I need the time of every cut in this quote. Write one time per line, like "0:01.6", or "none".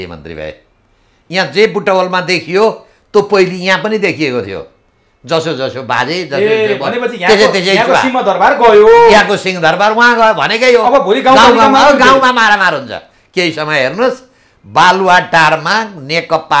none